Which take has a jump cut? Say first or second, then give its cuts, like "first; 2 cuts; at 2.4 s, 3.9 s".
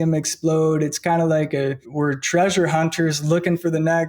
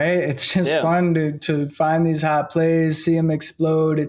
first; 1 cut; at 1.8 s